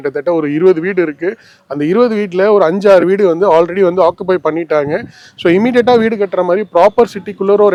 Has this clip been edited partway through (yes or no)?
no